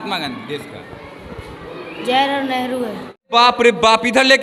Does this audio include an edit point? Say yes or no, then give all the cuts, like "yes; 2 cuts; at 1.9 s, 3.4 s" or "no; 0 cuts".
yes; 1 cut; at 3.3 s